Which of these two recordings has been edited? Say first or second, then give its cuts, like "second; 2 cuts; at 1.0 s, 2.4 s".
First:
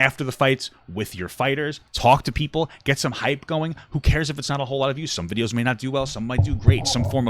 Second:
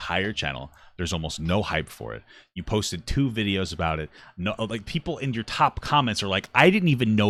first; 1 cut; at 1.8 s